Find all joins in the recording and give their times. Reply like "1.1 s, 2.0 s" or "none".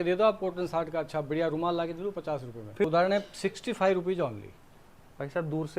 2.8 s